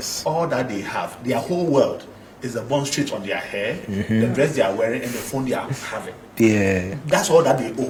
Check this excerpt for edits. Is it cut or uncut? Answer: uncut